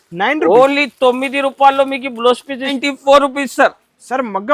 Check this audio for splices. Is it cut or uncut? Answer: cut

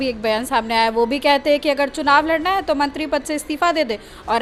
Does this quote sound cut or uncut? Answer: uncut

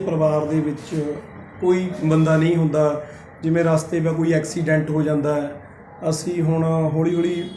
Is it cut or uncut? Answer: uncut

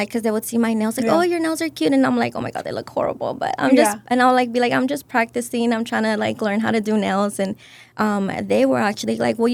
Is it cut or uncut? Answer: uncut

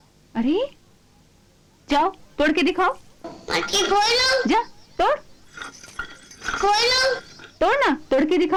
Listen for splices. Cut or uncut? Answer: uncut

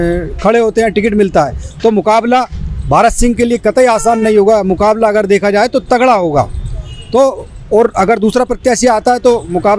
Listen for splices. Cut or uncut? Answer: uncut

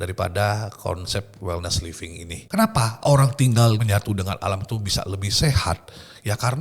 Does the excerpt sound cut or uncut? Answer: cut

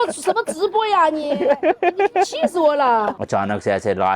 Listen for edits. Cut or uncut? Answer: cut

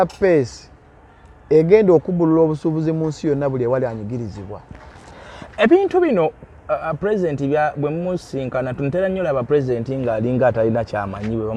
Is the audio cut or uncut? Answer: uncut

